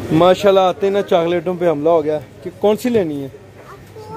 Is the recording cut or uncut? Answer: uncut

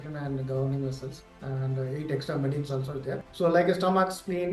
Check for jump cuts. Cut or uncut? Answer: cut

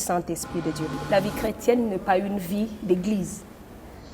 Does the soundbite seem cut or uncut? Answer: cut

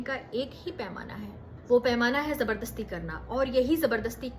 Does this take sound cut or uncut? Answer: cut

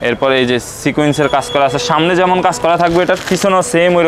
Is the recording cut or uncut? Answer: uncut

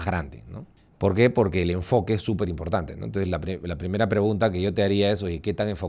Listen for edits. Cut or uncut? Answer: uncut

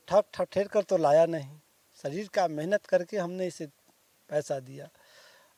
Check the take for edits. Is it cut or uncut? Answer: uncut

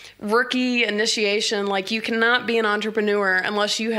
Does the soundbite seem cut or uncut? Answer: uncut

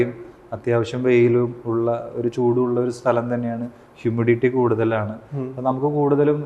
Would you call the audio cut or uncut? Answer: uncut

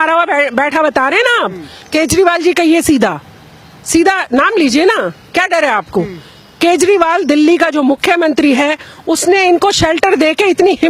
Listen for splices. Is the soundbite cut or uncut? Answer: uncut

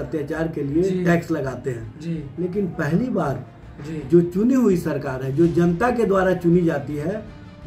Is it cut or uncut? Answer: uncut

